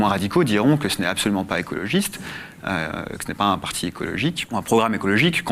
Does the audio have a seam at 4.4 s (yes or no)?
yes